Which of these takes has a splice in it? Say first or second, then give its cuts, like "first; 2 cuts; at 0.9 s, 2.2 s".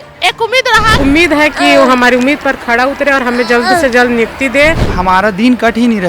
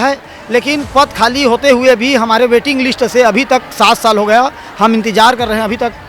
first; 2 cuts; at 1.0 s, 4.9 s